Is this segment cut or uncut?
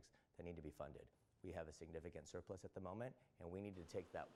uncut